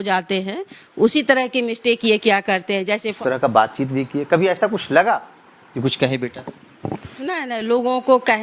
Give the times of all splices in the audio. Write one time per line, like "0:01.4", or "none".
0:03.1
0:07.1

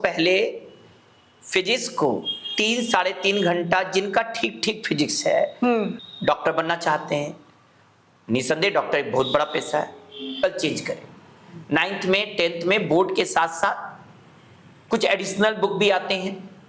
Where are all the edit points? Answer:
0:05.9
0:10.4

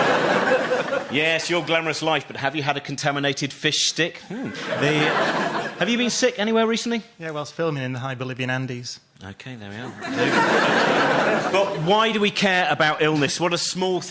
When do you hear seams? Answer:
0:12.1

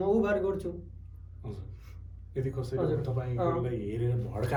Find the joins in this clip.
none

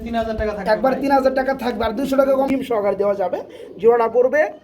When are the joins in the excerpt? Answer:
0:02.5

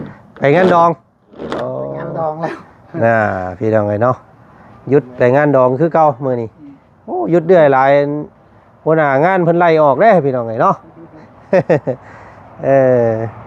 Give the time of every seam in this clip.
none

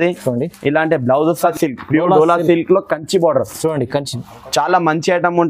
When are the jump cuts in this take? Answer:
0:01.5

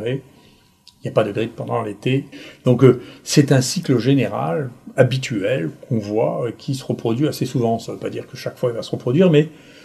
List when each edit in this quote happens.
0:02.3

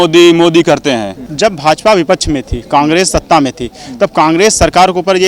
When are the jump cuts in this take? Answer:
0:01.2

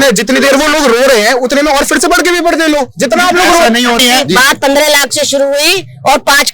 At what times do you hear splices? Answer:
0:04.0

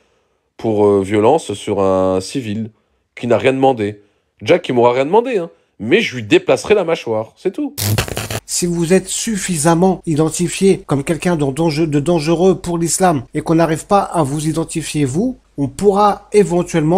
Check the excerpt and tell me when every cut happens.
0:08.1
0:10.0
0:10.8
0:13.3
0:15.4

